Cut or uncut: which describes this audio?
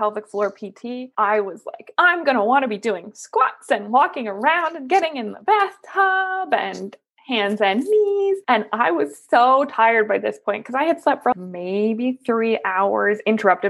uncut